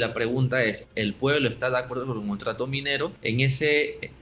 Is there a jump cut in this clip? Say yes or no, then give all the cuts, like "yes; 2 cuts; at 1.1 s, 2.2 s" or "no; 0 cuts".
yes; 1 cut; at 3.2 s